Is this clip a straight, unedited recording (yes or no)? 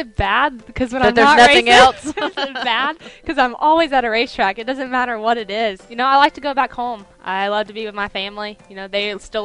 yes